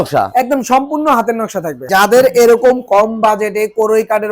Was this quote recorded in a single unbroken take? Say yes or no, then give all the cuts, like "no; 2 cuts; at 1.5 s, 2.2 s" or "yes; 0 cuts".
no; 1 cut; at 1.9 s